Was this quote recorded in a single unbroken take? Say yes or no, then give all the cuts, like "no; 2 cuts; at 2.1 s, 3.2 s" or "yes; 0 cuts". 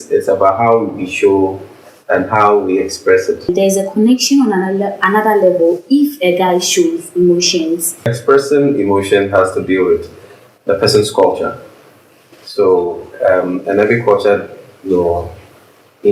no; 2 cuts; at 3.5 s, 8.2 s